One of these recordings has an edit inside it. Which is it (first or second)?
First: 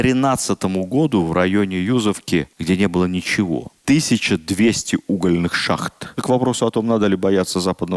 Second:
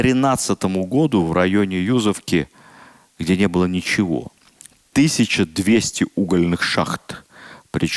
first